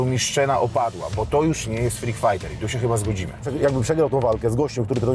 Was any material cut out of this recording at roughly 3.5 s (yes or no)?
yes